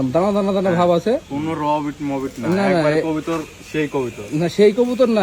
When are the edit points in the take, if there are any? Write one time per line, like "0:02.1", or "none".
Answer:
none

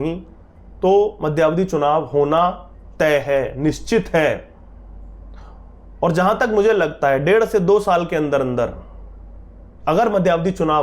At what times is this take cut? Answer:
none

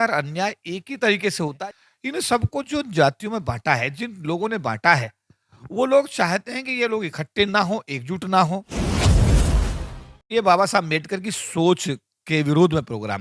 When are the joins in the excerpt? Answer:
0:01.6
0:08.7
0:10.3

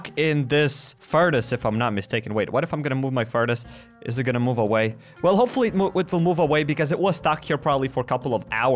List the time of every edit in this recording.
none

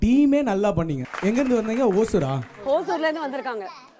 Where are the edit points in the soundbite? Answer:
0:01.0

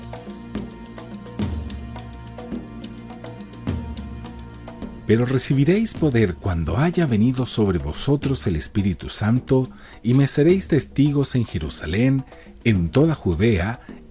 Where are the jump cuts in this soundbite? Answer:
none

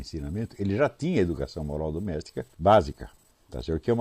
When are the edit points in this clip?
0:02.4

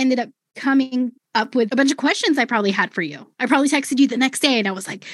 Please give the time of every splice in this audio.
0:01.7

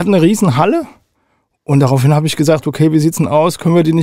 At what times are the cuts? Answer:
none

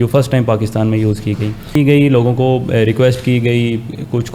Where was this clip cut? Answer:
0:01.8

